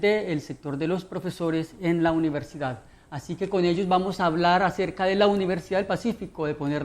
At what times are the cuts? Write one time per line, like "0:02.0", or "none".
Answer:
0:02.4

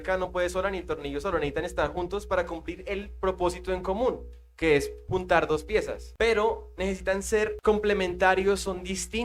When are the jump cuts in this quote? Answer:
0:06.0
0:07.6

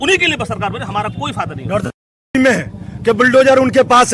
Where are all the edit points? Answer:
0:02.3

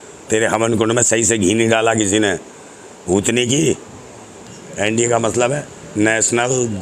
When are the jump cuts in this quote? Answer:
0:04.5

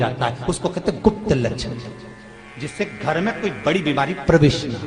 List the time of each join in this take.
none

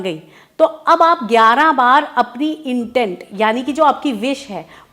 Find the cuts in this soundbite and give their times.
none

